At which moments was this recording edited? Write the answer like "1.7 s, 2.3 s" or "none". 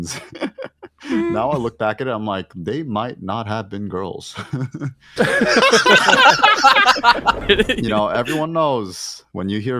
7.4 s